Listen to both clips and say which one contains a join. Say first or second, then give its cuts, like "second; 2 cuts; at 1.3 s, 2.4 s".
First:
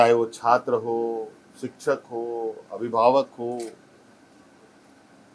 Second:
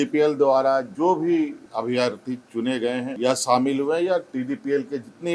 second; 3 cuts; at 0.9 s, 1.6 s, 3.1 s